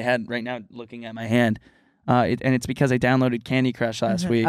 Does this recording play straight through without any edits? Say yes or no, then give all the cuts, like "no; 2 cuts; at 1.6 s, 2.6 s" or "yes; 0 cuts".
yes; 0 cuts